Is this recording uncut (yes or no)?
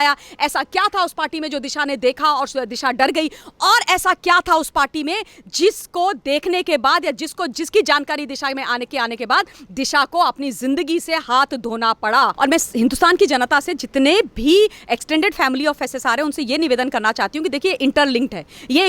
no